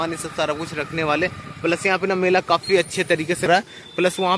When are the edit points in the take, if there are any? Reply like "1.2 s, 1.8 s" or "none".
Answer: 3.5 s

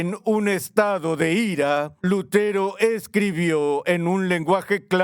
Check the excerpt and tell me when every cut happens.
1.9 s

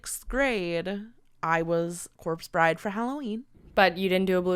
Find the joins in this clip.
none

